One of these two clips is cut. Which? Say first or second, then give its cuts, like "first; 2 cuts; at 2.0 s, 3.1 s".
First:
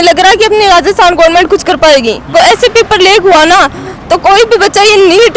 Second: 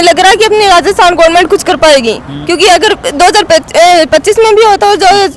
first; 1 cut; at 2.3 s